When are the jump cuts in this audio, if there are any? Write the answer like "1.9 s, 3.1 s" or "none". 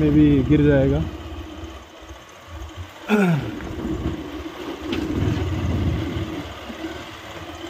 none